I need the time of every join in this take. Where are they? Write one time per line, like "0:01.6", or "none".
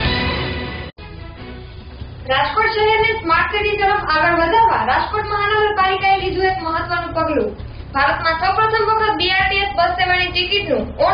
0:00.9